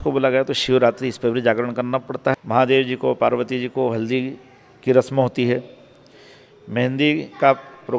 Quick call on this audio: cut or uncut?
cut